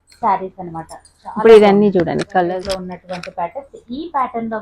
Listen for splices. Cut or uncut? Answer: cut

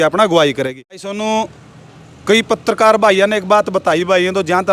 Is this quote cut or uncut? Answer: cut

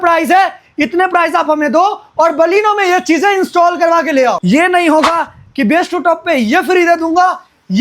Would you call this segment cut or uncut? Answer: cut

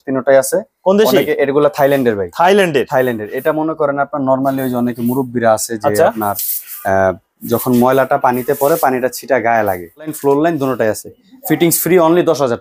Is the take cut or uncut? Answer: cut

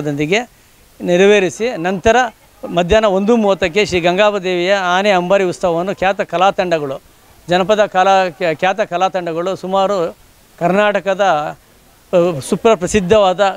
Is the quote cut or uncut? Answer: uncut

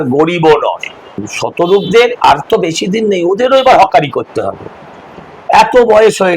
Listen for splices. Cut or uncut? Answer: cut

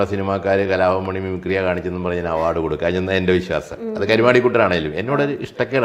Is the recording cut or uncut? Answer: uncut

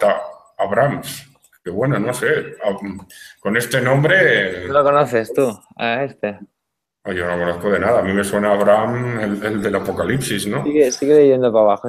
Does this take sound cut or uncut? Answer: uncut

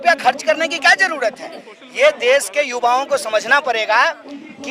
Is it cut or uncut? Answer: uncut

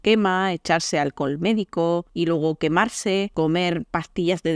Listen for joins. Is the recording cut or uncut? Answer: cut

